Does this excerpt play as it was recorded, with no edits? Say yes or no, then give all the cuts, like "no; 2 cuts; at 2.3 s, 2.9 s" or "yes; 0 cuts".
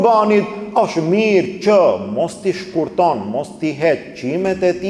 yes; 0 cuts